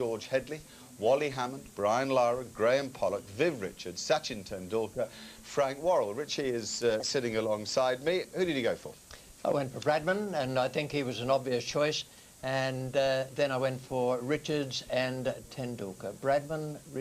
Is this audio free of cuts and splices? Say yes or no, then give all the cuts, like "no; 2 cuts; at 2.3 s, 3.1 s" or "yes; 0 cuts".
no; 1 cut; at 5.8 s